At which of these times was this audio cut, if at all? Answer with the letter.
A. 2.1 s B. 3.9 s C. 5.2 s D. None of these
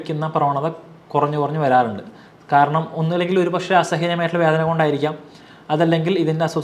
D